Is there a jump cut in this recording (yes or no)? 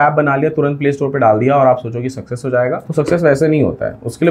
no